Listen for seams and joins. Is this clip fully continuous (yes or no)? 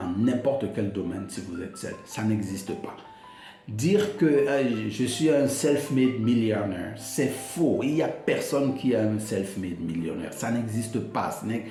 yes